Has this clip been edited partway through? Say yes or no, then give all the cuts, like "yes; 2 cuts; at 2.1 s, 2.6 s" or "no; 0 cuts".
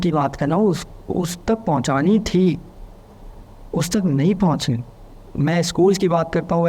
no; 0 cuts